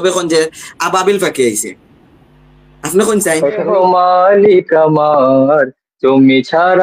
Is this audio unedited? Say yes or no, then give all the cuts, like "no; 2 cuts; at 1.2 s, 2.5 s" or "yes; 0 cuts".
no; 1 cut; at 3.6 s